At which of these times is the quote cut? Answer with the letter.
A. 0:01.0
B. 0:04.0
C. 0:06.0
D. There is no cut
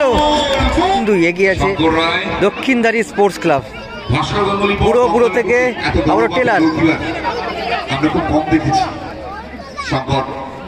A